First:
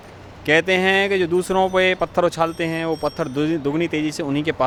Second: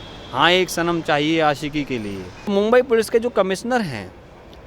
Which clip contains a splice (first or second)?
second